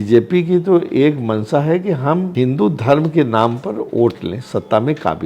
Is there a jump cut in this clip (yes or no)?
yes